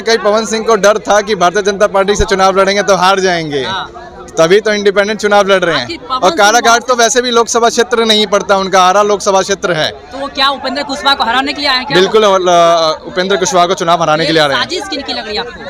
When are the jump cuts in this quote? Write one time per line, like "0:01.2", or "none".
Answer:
none